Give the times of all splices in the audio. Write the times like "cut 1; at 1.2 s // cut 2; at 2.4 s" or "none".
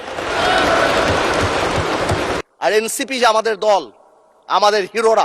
cut 1; at 2.4 s